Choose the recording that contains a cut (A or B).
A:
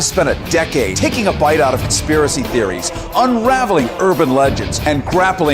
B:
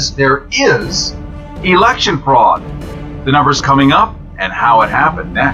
A